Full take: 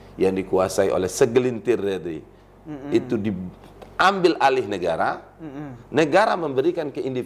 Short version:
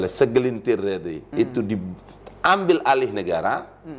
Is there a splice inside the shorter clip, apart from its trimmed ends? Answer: yes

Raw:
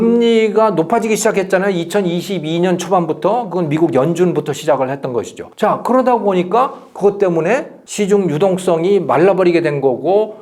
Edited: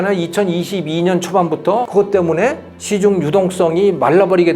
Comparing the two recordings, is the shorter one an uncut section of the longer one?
no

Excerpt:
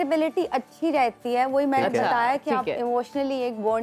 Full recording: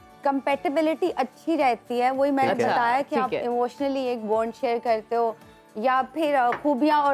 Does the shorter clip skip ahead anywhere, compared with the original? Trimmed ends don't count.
no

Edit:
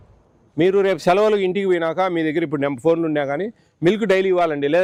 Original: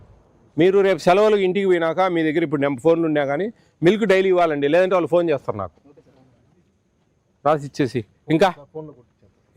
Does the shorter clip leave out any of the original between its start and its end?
no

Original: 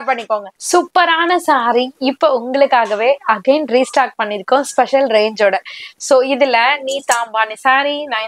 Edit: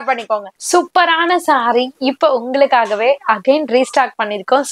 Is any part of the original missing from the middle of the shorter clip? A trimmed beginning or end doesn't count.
no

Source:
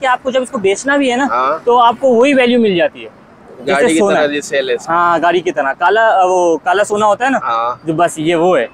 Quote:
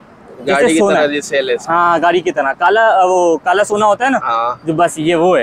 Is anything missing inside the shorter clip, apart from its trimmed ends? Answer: no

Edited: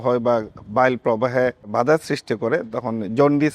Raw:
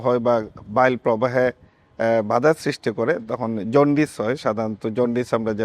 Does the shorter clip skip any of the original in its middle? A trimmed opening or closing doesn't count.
yes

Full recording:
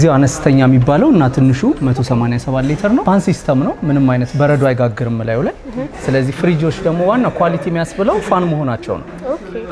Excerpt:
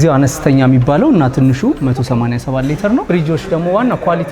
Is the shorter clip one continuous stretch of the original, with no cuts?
no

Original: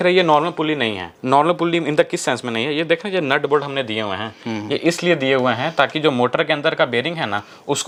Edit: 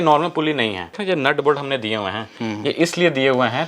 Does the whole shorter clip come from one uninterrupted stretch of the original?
no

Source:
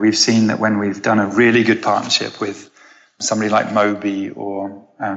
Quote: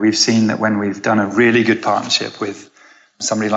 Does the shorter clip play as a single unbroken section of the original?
yes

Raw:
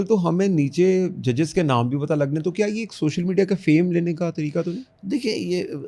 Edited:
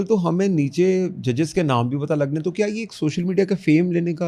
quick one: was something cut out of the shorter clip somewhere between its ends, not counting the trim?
no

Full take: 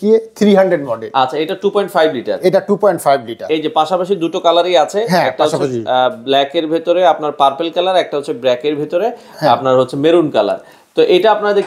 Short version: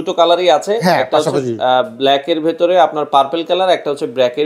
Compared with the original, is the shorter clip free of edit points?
yes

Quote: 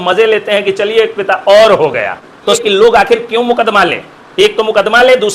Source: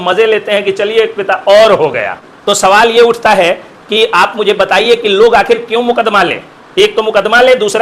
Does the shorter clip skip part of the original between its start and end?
yes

